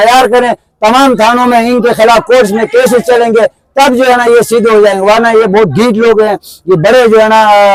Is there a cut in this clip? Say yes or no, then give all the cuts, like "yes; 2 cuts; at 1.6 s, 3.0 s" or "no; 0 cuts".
no; 0 cuts